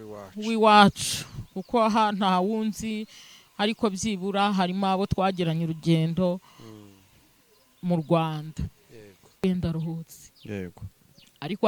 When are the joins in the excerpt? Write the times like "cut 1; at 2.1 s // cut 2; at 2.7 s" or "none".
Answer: cut 1; at 9.4 s